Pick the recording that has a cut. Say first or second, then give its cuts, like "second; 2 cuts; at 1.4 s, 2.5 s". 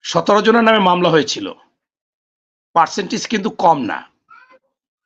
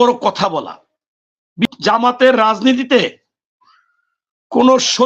second; 1 cut; at 1.8 s